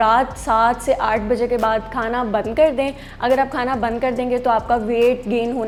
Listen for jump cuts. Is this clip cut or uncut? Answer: uncut